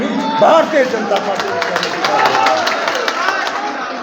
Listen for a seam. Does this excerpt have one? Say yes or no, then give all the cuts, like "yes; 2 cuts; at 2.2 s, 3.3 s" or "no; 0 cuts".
no; 0 cuts